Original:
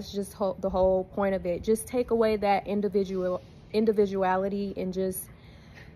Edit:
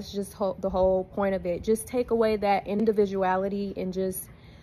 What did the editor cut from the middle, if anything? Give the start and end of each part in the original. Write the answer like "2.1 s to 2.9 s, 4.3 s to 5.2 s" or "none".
2.8 s to 3.8 s